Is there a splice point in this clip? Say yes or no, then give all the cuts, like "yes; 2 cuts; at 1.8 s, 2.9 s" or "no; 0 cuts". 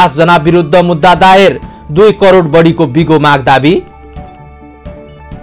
no; 0 cuts